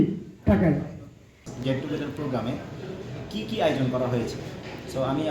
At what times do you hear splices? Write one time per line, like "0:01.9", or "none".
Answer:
0:01.5